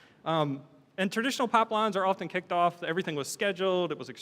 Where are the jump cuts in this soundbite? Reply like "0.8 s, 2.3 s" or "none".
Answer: 1.3 s